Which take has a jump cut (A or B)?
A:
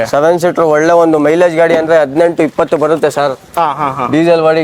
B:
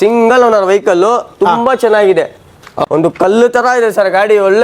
B